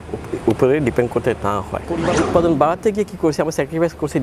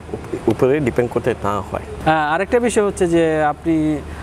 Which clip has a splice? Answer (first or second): first